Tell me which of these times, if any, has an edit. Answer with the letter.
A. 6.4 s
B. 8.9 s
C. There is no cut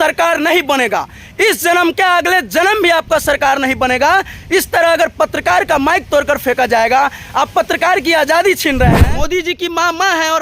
B